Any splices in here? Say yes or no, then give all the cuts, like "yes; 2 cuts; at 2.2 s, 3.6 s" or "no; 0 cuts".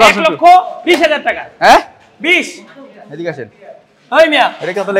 no; 0 cuts